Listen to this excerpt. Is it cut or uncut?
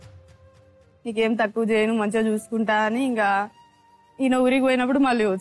uncut